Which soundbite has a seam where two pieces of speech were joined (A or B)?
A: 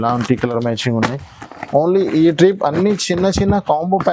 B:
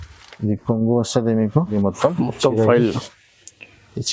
B